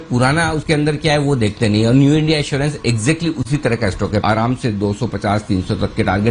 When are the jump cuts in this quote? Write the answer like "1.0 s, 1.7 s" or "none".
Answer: 4.2 s